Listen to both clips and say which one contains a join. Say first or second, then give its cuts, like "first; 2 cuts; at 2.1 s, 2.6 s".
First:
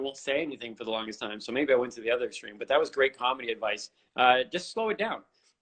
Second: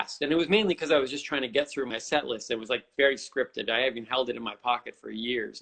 second; 1 cut; at 2.0 s